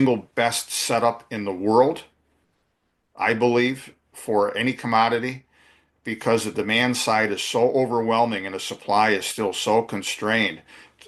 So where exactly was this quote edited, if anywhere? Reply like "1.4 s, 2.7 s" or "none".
none

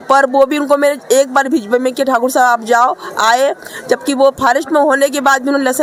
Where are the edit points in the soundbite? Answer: none

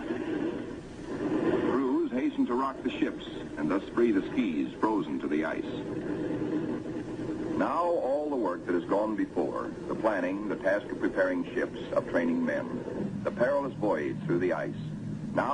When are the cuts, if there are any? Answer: 14.3 s

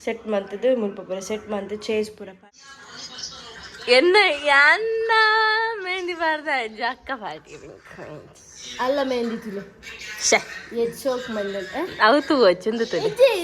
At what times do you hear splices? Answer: 2.3 s

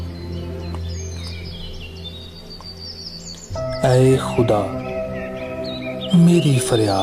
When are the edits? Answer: 3.8 s

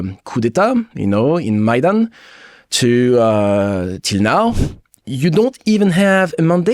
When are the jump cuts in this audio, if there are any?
4.6 s

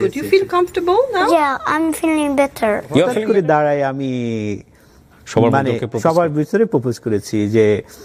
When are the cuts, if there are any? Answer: 3.0 s

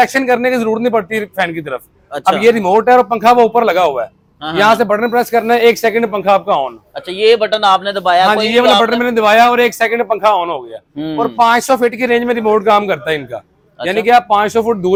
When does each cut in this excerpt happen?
none

